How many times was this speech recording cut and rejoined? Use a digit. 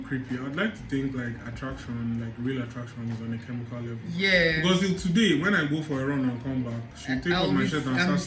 0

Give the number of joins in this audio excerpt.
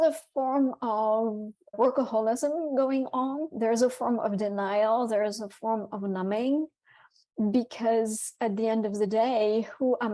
1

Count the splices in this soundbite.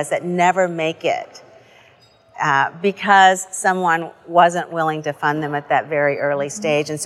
0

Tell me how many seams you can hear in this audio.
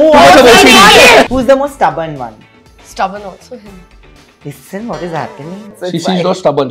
2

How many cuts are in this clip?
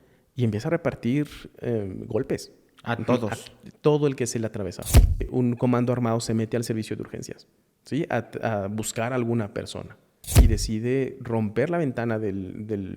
2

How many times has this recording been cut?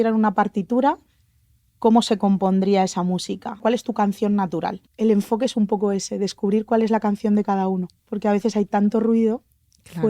3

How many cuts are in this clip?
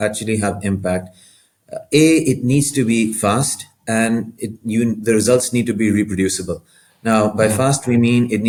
0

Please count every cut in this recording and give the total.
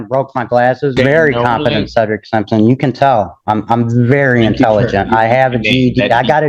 1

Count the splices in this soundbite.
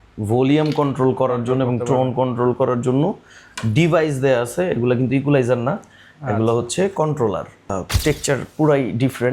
1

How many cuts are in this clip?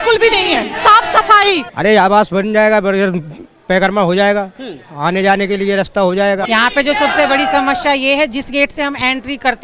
2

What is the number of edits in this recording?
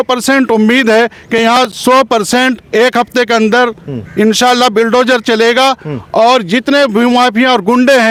0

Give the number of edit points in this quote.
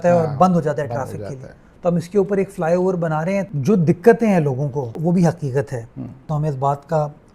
3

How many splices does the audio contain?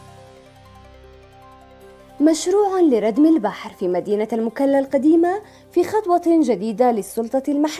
1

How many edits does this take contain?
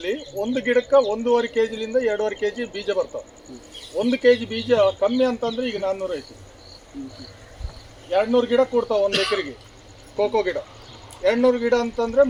0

